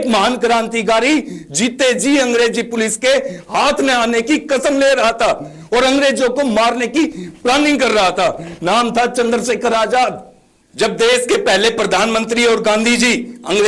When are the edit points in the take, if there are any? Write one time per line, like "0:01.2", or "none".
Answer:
none